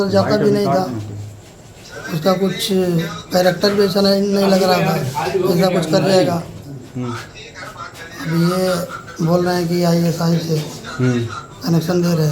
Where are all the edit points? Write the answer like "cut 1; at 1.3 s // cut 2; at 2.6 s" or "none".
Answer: none